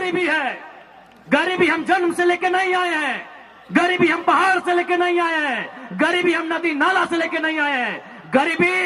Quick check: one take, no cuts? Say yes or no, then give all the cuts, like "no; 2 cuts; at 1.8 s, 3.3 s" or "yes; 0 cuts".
yes; 0 cuts